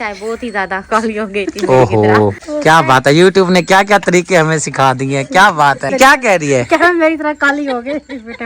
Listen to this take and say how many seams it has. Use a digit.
2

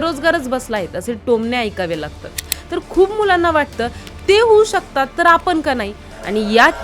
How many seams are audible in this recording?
1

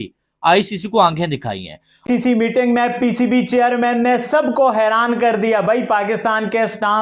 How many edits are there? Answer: 1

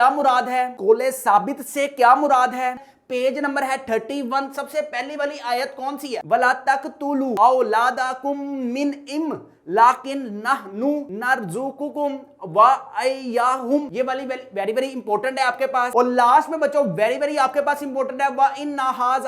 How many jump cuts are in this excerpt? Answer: 1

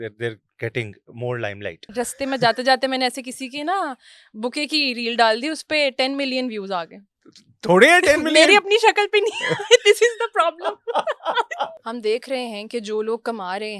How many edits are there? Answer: 2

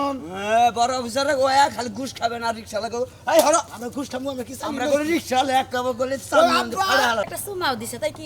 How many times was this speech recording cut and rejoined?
2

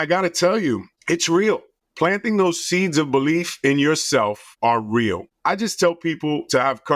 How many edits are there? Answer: 4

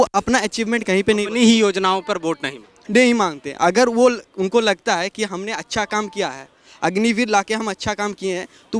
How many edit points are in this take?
0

